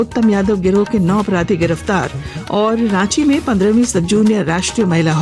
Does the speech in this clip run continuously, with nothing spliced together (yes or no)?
yes